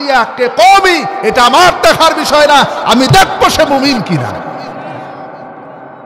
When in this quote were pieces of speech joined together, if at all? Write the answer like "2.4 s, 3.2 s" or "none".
none